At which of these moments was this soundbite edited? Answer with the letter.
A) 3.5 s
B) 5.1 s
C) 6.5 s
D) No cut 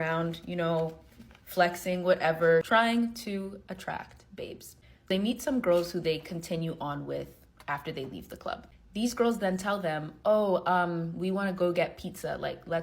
B